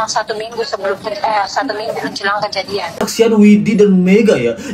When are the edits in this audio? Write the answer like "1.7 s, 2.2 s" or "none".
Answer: 3.1 s